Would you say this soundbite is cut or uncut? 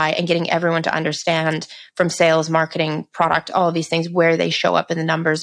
uncut